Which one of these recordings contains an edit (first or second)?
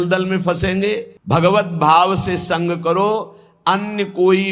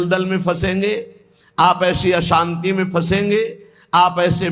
first